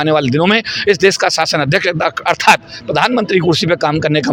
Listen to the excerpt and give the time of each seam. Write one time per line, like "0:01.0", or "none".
none